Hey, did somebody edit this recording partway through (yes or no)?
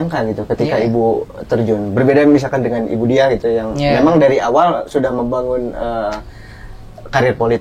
no